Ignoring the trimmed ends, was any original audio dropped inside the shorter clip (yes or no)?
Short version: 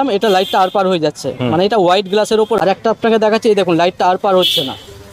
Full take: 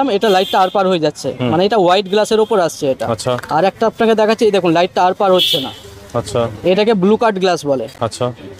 yes